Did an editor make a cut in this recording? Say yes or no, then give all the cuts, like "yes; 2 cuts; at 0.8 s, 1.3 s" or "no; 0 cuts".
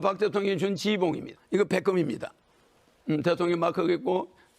yes; 1 cut; at 1.3 s